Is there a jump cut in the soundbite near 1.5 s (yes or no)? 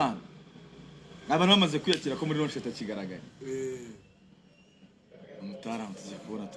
no